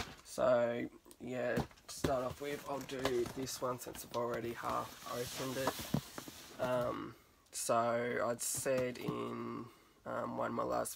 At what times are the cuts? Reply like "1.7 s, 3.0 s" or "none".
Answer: 5.7 s

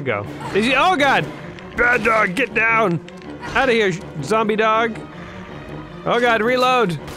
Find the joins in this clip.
none

